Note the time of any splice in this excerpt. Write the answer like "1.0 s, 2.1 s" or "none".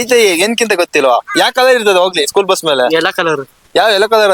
none